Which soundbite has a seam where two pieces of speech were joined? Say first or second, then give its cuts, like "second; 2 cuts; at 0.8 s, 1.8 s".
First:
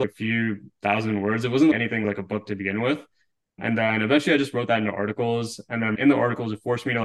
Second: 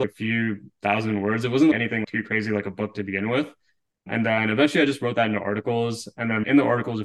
first; 1 cut; at 2.0 s